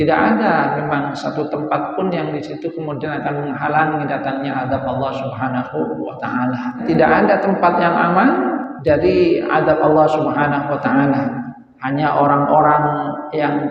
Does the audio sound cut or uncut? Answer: cut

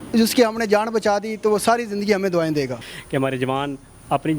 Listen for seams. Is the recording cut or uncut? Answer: cut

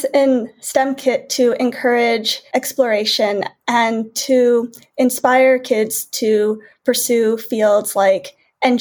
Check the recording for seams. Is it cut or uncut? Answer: cut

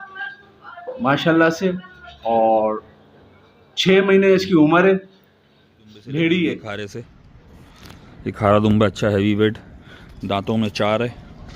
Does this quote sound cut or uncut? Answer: cut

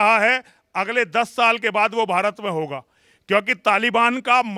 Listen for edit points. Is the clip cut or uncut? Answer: uncut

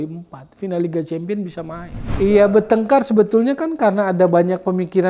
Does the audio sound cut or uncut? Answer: cut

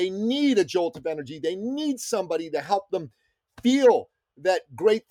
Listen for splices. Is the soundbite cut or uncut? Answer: uncut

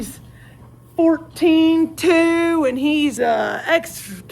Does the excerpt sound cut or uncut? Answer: cut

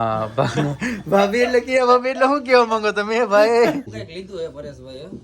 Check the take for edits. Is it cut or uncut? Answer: cut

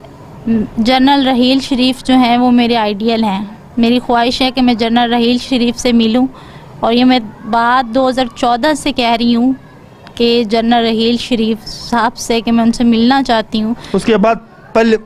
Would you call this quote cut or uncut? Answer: uncut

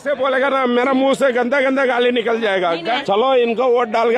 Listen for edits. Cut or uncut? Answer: cut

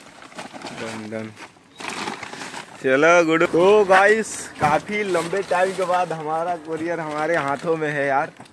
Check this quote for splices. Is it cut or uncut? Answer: cut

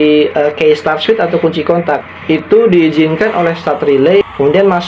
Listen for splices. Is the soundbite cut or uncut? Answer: uncut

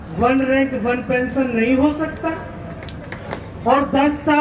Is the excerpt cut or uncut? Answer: cut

